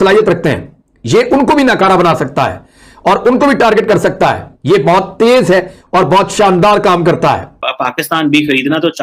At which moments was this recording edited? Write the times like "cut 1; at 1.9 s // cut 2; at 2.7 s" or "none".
cut 1; at 7.5 s